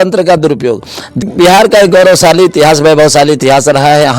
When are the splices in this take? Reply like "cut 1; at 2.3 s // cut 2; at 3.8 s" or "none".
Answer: cut 1; at 1.2 s

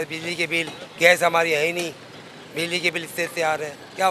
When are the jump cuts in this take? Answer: none

